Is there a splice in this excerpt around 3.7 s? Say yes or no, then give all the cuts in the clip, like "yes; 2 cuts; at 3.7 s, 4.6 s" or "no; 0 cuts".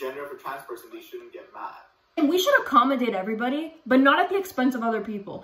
no; 1 cut; at 2.2 s